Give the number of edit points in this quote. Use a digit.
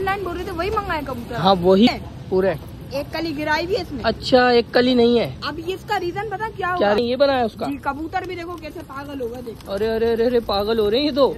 2